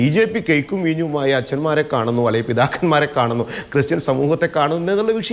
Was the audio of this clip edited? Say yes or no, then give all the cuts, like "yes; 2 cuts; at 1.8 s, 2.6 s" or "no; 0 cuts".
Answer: no; 0 cuts